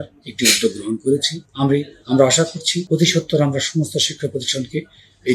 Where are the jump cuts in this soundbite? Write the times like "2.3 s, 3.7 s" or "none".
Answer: 1.4 s, 2.9 s